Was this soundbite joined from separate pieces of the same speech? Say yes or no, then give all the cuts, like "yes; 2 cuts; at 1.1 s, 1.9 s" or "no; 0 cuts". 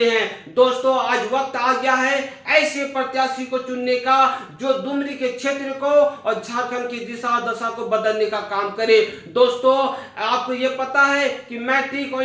no; 0 cuts